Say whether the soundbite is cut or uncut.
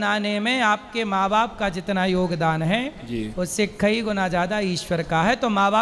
uncut